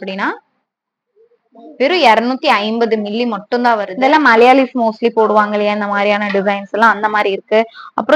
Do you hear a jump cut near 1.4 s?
no; 1 cut; at 3.9 s

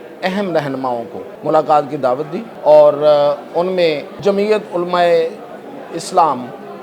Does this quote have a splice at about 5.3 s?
no; 3 cuts; at 1.2 s, 2.4 s, 4.1 s

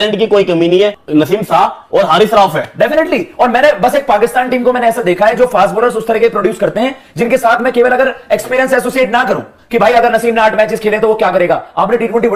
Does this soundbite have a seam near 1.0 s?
yes; 1 cut; at 1.0 s

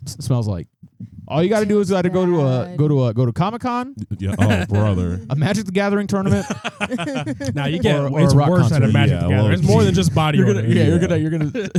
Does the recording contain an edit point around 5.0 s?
no; 0 cuts

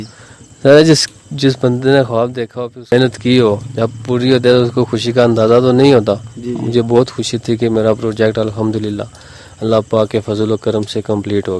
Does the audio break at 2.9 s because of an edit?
yes; 1 cut; at 2.9 s

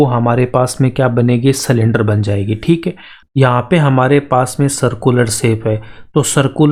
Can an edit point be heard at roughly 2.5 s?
no; 0 cuts

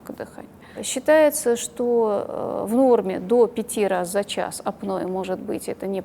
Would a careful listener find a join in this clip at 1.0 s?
no; 0 cuts

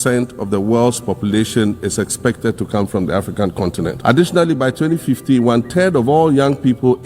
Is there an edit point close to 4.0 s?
yes; 1 cut; at 4.0 s

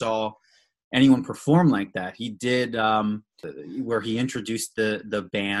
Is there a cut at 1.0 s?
no; 1 cut; at 3.5 s

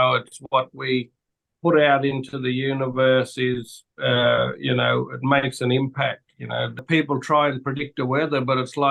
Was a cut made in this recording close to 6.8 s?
yes; 1 cut; at 6.8 s

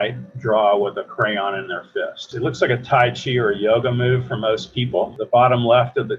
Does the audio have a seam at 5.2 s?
yes; 2 cuts; at 2.3 s, 5.2 s

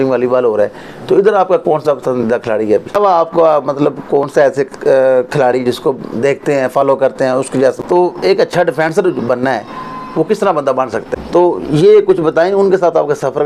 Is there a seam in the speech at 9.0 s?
no; 3 cuts; at 2.9 s, 7.8 s, 11.1 s

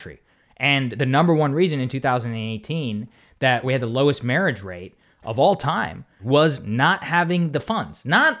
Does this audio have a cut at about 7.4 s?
no; 2 cuts; at 3.7 s, 6.1 s

